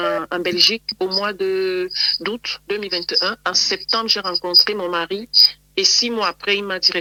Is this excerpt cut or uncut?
uncut